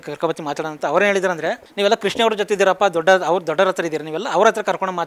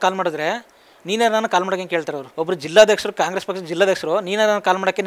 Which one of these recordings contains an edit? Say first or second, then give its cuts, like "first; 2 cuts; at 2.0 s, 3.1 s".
second; 1 cut; at 2.2 s